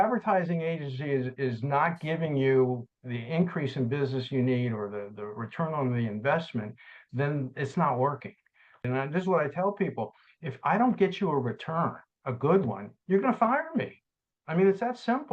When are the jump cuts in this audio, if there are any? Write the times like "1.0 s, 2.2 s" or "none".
8.9 s